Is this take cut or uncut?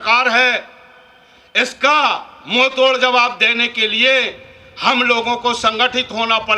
uncut